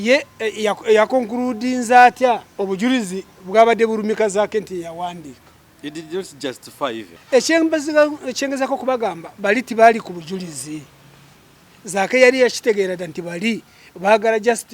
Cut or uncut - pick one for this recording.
cut